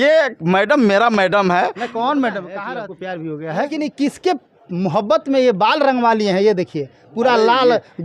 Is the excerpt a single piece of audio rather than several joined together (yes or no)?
no